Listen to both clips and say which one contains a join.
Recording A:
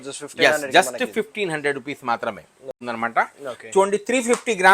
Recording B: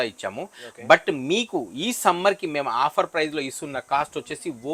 A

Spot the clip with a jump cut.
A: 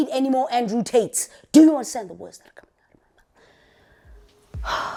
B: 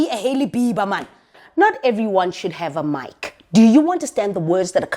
B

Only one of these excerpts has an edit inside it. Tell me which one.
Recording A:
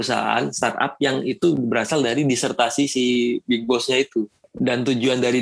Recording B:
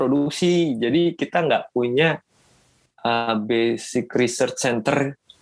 A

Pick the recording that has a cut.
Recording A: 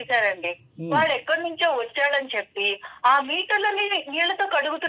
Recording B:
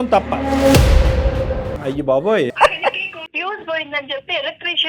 B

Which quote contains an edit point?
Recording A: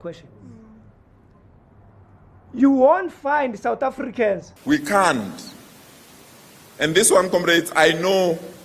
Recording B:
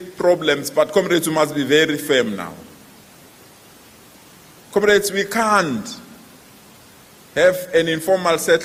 A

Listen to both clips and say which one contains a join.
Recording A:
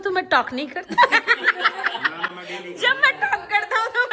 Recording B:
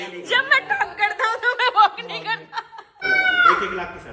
B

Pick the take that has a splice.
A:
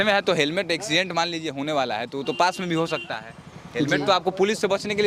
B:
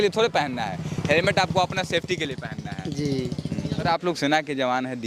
B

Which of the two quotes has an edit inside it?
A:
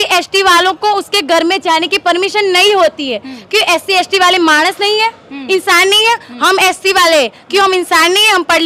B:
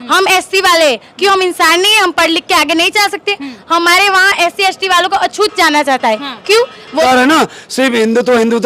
B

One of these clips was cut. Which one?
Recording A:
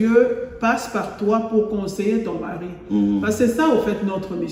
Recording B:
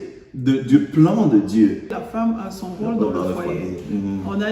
B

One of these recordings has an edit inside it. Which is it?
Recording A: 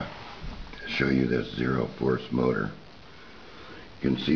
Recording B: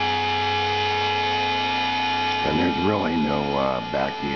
A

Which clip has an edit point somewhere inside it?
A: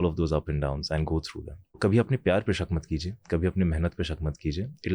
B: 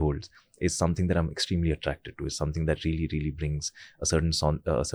A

